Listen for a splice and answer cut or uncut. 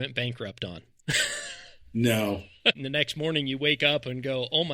cut